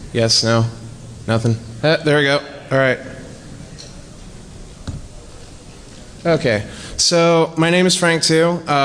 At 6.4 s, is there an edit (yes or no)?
no